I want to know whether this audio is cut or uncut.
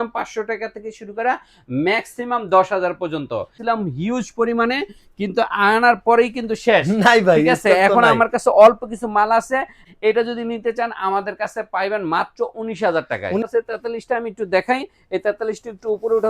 cut